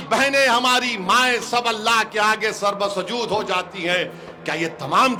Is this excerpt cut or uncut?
uncut